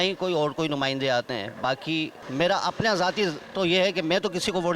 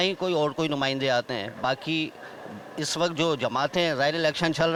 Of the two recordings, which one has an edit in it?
first; 1 cut; at 2.2 s

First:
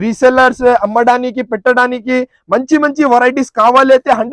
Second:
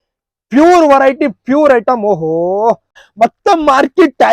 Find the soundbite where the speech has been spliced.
second; 1 cut; at 3.0 s

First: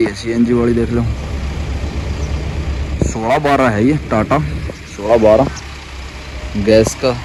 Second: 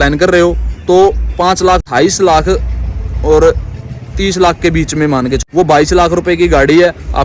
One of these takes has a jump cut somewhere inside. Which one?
second; 2 cuts; at 1.8 s, 5.4 s

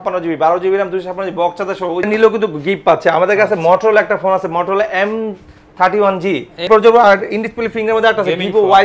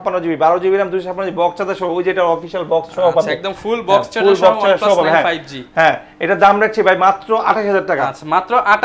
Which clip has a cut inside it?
first; 2 cuts; at 2.0 s, 6.7 s

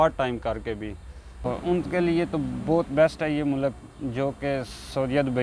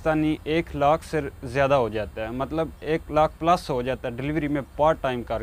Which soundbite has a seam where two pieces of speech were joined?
first; 1 cut; at 1.5 s

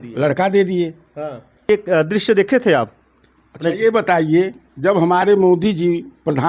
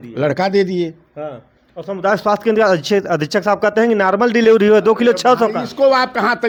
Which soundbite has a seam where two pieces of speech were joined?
first; 1 cut; at 1.7 s

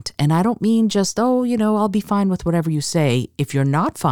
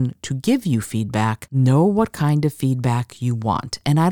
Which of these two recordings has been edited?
second; 1 cut; at 1.4 s

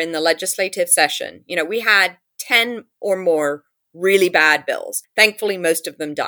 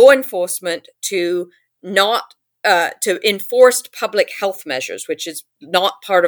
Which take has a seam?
first; 1 cut; at 5.0 s

